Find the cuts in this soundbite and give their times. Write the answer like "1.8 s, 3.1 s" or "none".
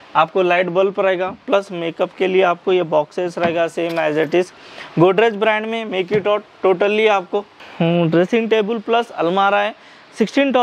none

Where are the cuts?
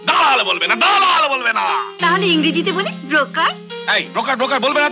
none

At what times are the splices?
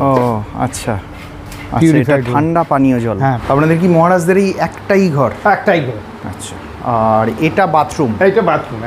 3.4 s

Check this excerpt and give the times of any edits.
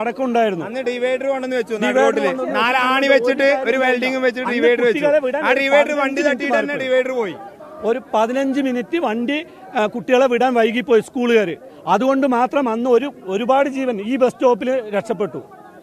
none

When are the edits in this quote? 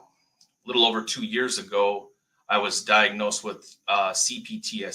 none

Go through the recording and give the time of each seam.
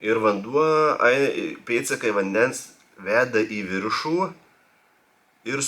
none

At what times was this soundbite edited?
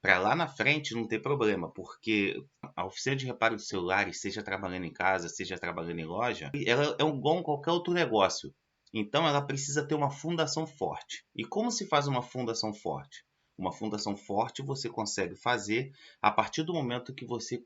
2.7 s, 6.6 s

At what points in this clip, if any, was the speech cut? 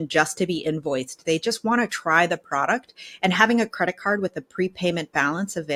none

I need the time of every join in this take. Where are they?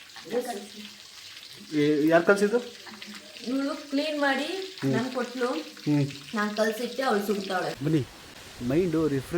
7.8 s

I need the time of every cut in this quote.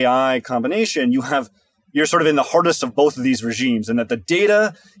none

